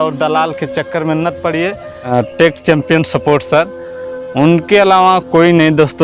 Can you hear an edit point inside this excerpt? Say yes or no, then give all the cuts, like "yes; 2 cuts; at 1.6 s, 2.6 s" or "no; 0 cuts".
yes; 1 cut; at 2.1 s